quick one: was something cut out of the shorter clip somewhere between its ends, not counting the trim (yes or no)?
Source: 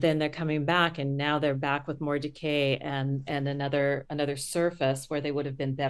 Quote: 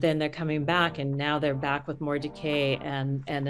no